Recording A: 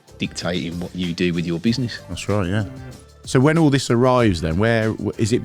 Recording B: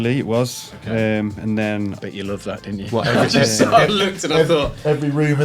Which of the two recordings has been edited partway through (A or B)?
A